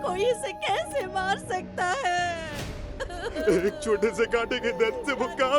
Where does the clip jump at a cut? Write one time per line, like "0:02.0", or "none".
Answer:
none

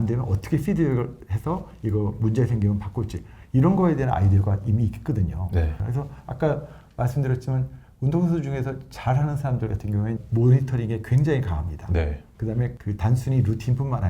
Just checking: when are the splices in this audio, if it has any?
0:05.8
0:10.2
0:12.8

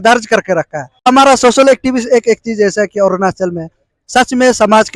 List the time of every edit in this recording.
0:01.1

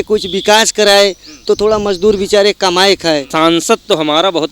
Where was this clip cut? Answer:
0:03.3

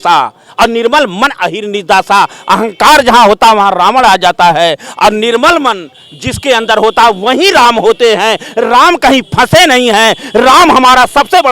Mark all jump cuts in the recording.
none

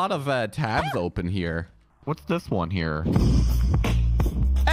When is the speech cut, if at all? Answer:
0:01.8

